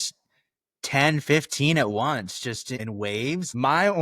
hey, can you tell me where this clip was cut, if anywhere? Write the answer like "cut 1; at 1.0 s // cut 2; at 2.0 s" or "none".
cut 1; at 2.9 s